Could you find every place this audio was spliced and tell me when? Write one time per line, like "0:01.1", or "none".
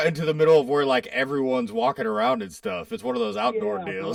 none